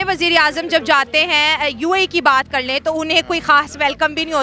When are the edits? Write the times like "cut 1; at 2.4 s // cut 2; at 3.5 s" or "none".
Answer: none